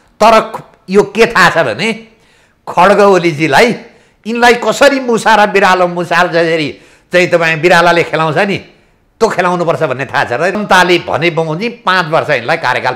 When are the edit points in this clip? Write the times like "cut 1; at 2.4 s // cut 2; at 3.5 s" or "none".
cut 1; at 10.6 s